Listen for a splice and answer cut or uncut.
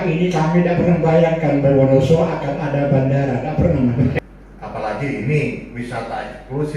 cut